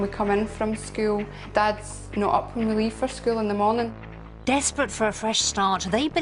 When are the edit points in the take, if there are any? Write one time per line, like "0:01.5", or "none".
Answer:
0:01.4
0:03.7

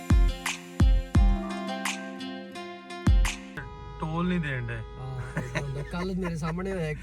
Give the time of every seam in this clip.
0:03.4

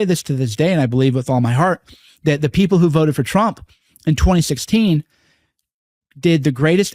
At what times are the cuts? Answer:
none

